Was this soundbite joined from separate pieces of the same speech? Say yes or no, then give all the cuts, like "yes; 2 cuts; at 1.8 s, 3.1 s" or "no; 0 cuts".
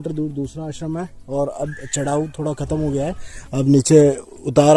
no; 0 cuts